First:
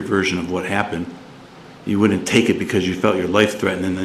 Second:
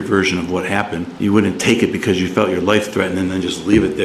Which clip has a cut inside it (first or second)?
second